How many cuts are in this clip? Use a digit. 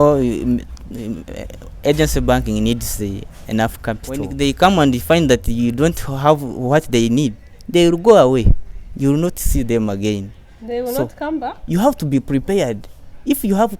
1